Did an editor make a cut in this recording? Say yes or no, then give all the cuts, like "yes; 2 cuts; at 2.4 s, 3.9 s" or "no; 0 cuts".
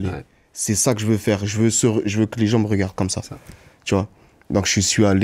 no; 0 cuts